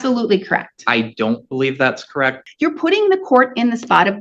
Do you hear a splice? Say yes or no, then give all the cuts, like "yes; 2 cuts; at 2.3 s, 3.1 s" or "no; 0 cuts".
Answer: yes; 1 cut; at 2.4 s